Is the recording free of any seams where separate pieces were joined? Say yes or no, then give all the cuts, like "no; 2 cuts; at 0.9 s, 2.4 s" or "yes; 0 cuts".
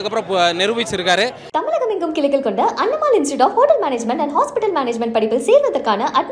no; 1 cut; at 1.4 s